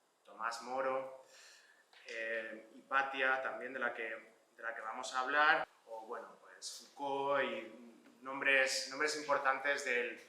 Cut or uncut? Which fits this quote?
cut